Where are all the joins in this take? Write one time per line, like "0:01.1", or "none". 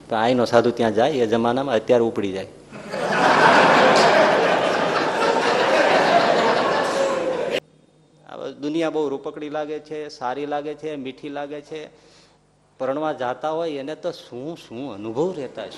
0:07.6